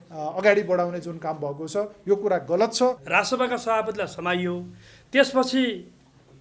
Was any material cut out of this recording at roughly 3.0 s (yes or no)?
yes